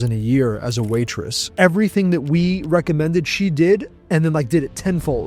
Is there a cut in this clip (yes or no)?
yes